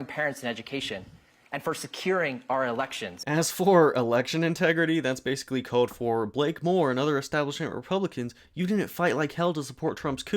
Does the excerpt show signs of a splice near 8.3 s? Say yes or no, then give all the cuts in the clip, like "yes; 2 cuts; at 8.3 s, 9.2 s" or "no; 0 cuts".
no; 1 cut; at 3.1 s